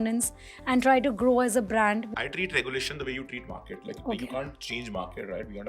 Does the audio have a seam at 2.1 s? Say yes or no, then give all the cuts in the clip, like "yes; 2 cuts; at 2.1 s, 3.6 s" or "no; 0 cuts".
yes; 1 cut; at 2.1 s